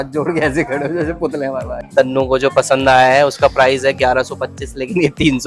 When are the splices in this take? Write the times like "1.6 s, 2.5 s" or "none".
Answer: 1.8 s